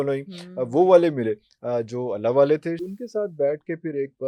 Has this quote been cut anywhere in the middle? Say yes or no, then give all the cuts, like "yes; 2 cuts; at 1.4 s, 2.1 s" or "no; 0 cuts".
yes; 1 cut; at 2.8 s